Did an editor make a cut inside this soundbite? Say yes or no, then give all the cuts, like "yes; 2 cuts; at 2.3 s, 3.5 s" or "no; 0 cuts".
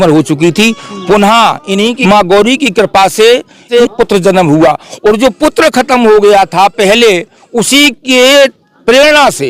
yes; 2 cuts; at 2.0 s, 3.7 s